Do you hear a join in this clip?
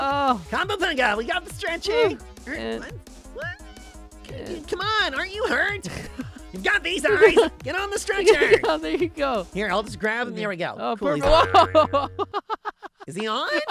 yes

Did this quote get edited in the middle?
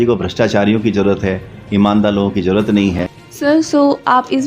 yes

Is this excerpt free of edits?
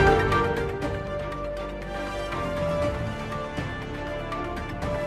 no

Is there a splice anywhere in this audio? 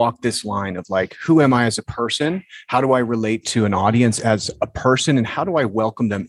no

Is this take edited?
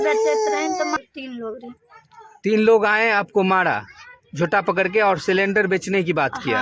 yes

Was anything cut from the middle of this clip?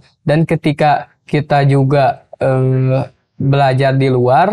no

